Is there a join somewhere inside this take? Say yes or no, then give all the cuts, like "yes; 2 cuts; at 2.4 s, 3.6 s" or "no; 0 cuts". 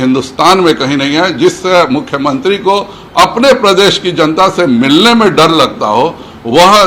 no; 0 cuts